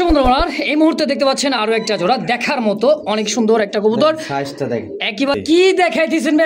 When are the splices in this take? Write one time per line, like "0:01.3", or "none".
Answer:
0:05.3